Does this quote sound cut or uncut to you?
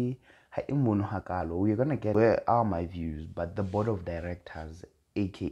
cut